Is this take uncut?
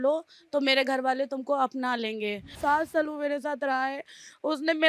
no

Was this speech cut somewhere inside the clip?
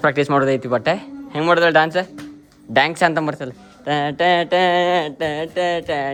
no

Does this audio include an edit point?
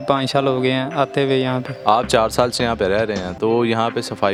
no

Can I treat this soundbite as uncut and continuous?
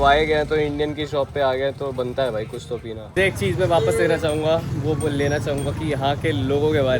no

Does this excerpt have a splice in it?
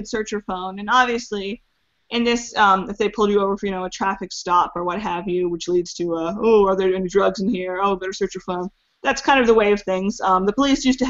yes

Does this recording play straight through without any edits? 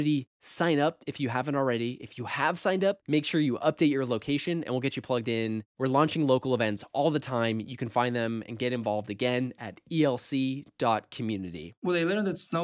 no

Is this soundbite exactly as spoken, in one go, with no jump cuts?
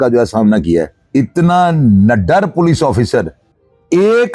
no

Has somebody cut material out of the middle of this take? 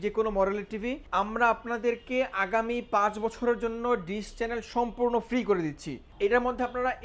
yes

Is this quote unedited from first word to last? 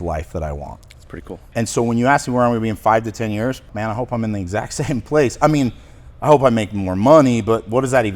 no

